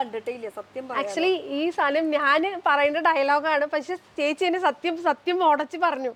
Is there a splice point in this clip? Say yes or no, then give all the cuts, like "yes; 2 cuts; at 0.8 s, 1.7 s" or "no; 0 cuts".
no; 0 cuts